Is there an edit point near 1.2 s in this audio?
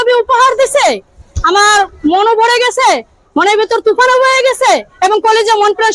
no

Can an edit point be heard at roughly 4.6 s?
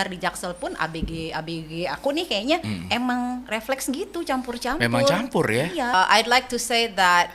no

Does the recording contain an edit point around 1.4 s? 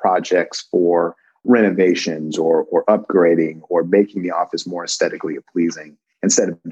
yes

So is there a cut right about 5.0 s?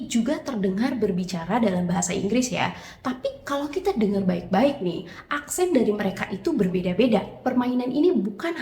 no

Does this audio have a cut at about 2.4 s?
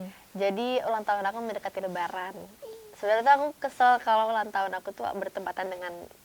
no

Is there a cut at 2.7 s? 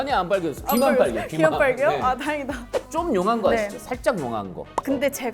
yes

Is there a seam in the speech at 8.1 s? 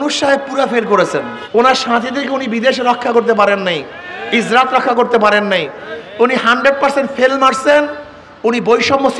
no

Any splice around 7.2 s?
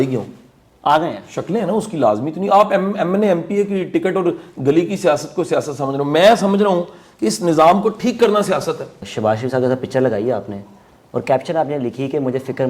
no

